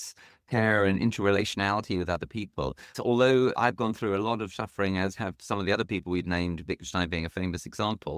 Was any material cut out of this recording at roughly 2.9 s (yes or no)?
yes